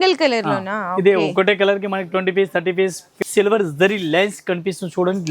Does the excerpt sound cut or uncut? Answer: cut